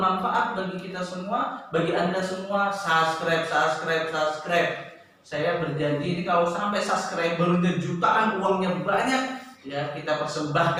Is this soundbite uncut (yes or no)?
yes